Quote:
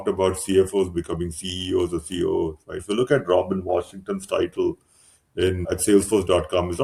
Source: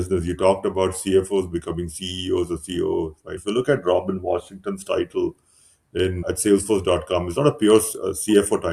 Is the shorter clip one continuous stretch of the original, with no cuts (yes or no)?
yes